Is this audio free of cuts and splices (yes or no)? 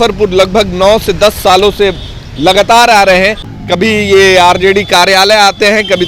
no